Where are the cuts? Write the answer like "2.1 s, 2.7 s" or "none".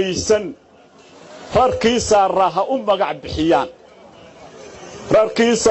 none